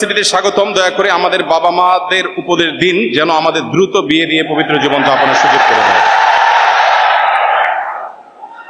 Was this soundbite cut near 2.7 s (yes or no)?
no